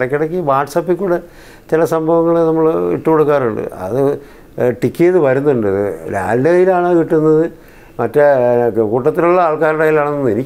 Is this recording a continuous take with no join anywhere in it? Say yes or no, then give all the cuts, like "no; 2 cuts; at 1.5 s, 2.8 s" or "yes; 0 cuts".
yes; 0 cuts